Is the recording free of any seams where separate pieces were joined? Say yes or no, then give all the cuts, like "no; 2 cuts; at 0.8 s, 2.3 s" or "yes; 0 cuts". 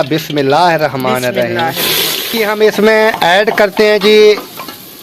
no; 1 cut; at 2.2 s